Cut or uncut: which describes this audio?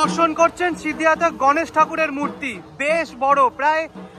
uncut